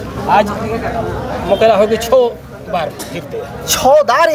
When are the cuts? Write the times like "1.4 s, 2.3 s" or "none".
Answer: none